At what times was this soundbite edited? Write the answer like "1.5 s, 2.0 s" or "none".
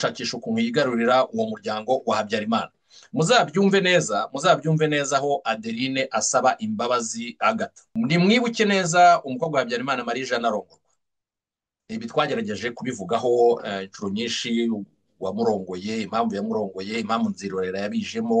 7.8 s